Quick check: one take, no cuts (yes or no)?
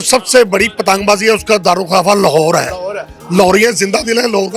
yes